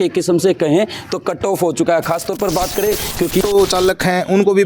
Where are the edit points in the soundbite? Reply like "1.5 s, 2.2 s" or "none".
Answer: 3.4 s